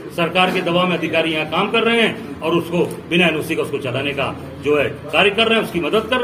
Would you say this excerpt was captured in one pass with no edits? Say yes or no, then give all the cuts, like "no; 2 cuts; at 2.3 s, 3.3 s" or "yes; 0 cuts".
yes; 0 cuts